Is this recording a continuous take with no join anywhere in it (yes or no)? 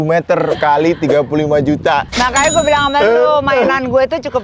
yes